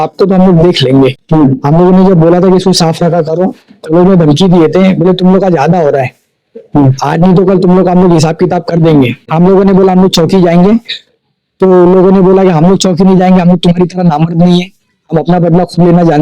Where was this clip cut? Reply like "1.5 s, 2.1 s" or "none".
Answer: 1.2 s, 9.3 s